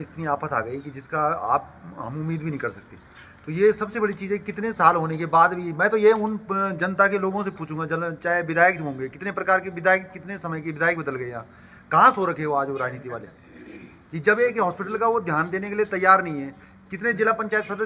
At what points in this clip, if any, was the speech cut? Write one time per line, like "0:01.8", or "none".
none